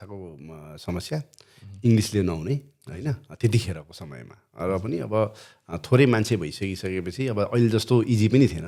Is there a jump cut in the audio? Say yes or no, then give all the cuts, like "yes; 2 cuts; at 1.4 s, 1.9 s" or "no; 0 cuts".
no; 0 cuts